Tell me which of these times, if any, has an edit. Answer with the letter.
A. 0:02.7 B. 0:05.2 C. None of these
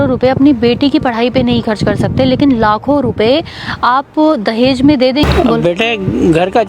B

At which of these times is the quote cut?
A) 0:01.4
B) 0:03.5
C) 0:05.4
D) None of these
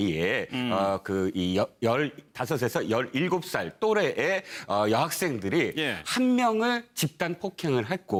D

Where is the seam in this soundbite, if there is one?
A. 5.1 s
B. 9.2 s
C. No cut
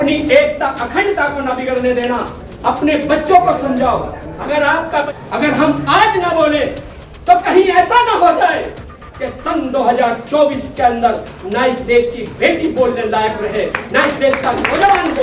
A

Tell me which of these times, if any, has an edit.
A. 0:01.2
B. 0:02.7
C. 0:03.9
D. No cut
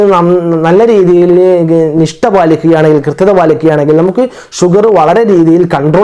D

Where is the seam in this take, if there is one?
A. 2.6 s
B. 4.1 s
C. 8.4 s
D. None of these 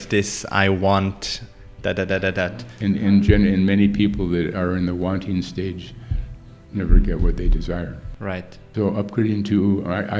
A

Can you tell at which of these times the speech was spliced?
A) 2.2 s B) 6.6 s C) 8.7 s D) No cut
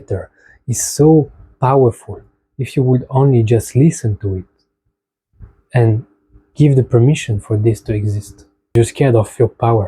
C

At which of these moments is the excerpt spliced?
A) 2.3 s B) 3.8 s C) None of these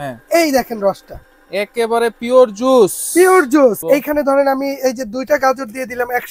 B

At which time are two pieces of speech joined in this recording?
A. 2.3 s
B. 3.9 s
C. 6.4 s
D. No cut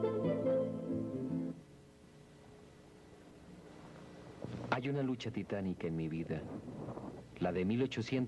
D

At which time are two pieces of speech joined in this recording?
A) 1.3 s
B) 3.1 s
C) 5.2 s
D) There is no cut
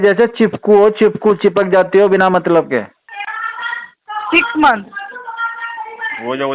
B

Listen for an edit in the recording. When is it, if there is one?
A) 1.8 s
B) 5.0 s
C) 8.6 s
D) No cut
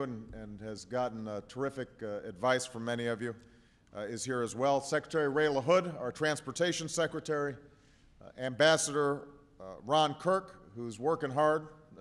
D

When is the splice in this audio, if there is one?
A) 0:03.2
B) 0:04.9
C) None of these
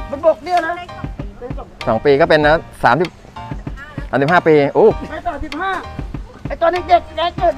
B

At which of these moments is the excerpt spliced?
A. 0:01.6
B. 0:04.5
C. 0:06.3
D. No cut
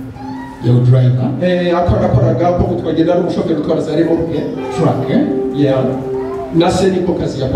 D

